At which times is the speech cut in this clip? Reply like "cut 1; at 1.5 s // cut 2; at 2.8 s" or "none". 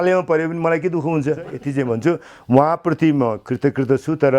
cut 1; at 1.6 s